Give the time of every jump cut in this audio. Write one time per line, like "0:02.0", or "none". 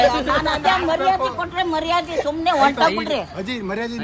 none